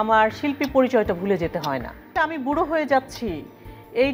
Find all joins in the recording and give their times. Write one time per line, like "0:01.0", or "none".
0:02.2